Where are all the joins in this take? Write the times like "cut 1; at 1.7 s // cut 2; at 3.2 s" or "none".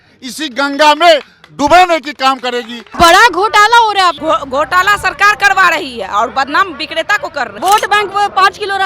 cut 1; at 2.8 s // cut 2; at 7.5 s